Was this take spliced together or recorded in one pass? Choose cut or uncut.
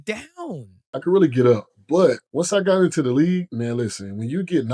cut